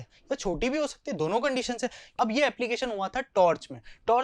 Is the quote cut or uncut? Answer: cut